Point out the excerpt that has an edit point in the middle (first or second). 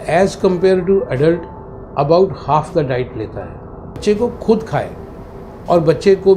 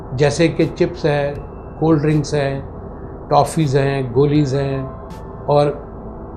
first